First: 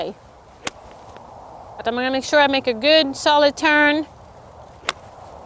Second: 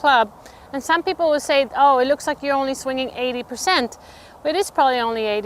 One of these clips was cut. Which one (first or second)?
first